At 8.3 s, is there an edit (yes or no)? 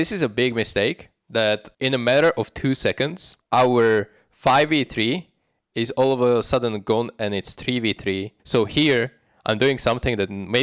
yes